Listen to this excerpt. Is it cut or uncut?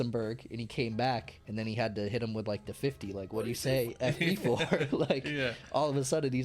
cut